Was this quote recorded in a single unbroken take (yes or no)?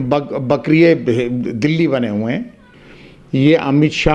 no